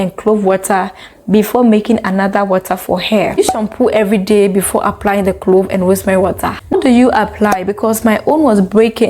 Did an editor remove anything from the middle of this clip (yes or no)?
yes